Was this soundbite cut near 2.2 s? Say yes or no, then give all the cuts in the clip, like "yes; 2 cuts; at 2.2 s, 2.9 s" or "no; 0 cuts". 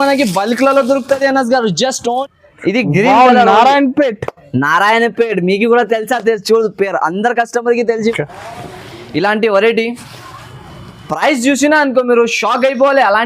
yes; 2 cuts; at 2.2 s, 8.1 s